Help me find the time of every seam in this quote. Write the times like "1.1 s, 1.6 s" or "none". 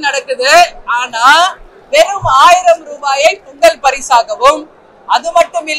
none